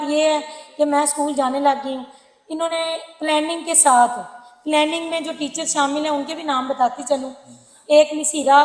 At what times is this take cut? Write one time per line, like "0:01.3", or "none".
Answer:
none